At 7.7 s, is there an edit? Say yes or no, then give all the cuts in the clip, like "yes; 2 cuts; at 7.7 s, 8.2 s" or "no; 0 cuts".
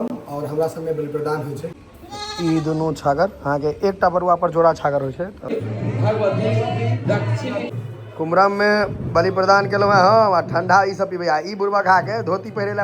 yes; 3 cuts; at 1.8 s, 5.5 s, 7.7 s